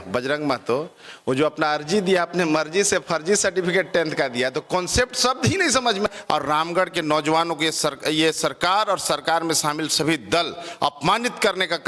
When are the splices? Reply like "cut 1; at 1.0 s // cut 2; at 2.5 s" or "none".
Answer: cut 1; at 6.1 s